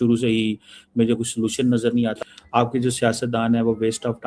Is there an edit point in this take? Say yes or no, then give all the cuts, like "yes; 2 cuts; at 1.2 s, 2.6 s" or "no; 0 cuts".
yes; 1 cut; at 2.2 s